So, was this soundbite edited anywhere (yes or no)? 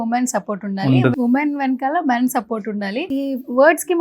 yes